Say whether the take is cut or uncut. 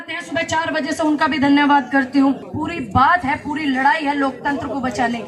cut